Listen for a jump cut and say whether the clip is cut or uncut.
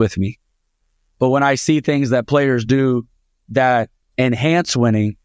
cut